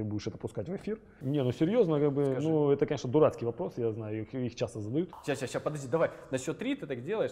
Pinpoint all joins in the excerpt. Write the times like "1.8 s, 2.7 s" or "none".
1.2 s, 5.1 s

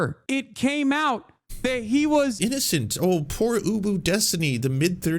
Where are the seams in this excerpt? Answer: 2.4 s

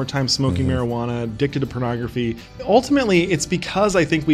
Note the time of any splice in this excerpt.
2.5 s

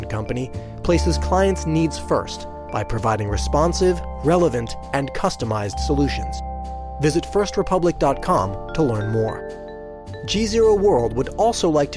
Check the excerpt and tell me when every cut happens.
none

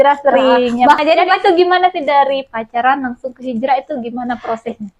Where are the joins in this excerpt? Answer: 1.0 s

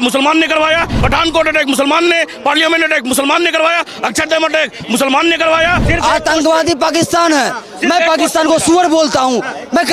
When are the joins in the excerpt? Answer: 0.9 s, 5.9 s

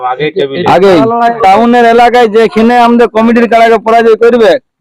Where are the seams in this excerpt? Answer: 1.3 s

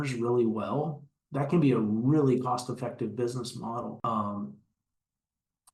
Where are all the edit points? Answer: 4.0 s

